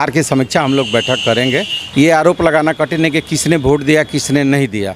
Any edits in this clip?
yes; 1 cut; at 1.8 s

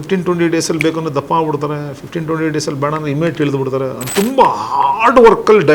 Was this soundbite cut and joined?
yes; 1 cut; at 4.0 s

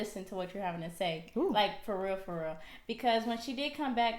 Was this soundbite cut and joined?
no; 0 cuts

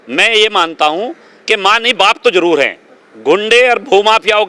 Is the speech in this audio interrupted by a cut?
no; 0 cuts

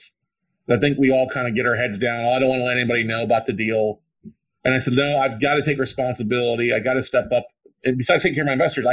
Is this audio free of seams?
yes; 0 cuts

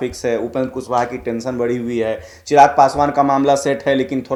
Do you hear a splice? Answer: no; 0 cuts

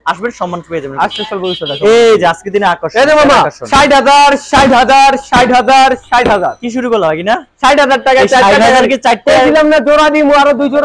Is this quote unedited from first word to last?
yes; 0 cuts

